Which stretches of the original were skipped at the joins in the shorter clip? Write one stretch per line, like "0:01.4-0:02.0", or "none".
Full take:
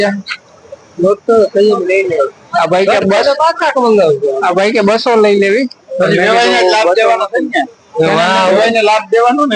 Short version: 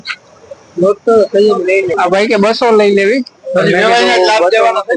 0:02.1-0:04.4